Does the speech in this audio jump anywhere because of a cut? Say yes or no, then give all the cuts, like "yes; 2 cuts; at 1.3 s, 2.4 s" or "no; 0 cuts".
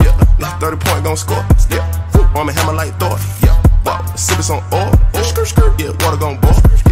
no; 0 cuts